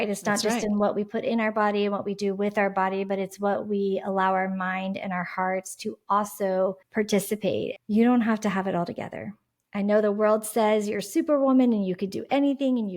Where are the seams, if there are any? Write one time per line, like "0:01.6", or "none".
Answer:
0:07.2